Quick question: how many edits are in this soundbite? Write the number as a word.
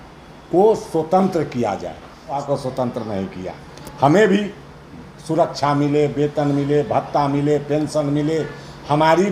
one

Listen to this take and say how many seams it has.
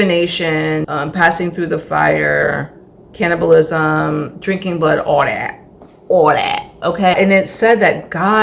three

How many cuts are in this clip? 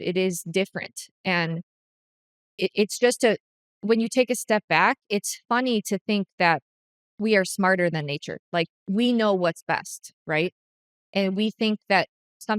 zero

